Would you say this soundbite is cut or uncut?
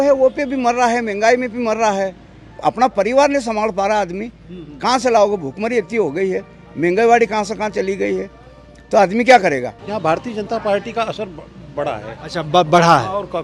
cut